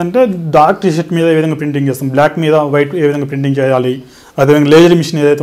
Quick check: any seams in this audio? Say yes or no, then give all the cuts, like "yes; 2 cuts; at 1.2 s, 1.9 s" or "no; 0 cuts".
no; 0 cuts